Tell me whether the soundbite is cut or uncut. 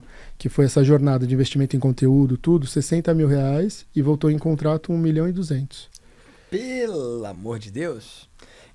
uncut